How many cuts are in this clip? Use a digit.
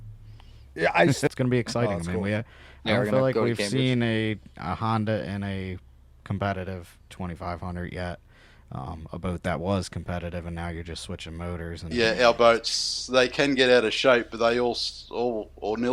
2